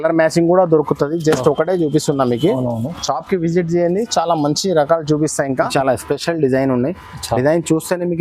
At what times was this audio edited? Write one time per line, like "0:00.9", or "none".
0:05.7